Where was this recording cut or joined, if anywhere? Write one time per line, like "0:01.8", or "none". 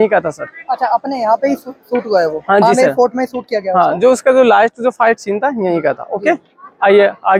none